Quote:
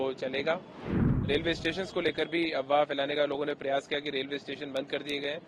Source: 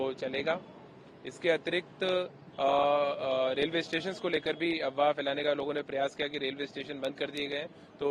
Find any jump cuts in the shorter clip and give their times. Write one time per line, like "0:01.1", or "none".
0:01.3